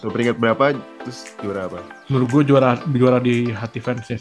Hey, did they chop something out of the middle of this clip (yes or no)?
no